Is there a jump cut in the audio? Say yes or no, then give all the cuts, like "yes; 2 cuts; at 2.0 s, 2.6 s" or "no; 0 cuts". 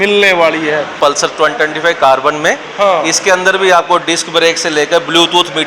yes; 1 cut; at 1.0 s